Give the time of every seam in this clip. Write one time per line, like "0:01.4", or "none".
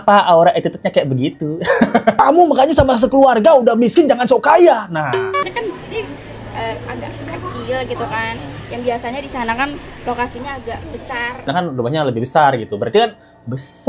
0:02.1
0:05.4
0:11.5